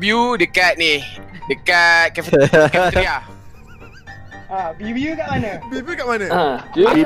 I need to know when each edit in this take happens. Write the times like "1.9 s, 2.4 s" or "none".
none